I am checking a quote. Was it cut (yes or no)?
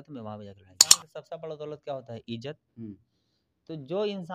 yes